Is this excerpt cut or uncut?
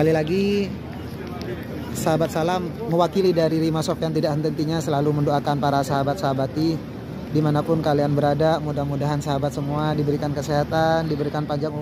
uncut